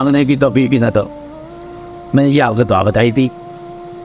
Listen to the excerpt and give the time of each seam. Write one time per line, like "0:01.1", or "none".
none